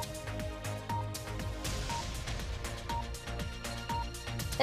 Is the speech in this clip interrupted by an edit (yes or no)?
no